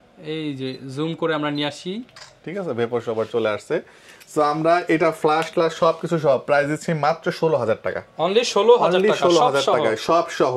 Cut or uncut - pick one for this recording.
uncut